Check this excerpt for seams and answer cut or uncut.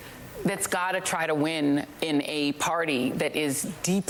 uncut